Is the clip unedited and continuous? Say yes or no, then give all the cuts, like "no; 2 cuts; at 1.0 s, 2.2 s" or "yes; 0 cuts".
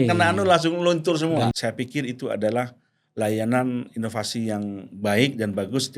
no; 1 cut; at 1.5 s